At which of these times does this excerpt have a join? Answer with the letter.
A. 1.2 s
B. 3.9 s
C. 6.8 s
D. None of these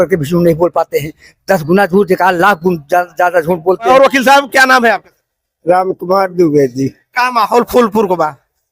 B